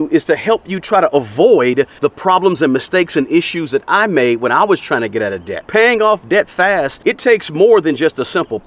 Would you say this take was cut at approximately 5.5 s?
yes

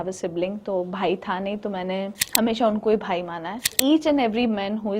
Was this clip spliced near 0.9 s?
no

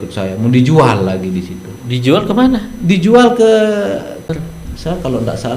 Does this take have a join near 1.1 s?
no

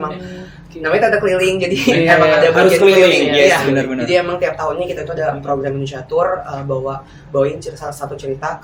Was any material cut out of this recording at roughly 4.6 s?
no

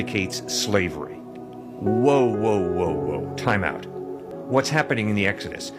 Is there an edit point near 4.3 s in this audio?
yes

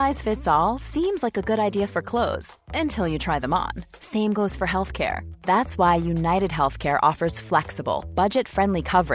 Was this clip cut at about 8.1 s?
no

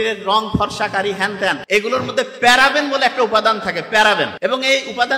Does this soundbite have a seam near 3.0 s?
no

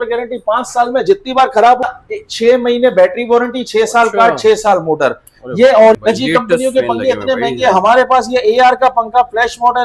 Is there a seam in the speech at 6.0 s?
yes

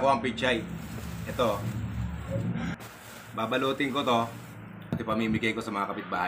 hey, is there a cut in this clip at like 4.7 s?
yes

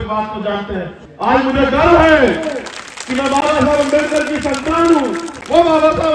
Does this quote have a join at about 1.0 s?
yes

